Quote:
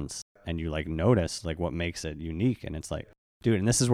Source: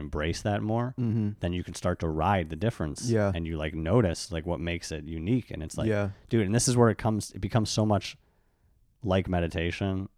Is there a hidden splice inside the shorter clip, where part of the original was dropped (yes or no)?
no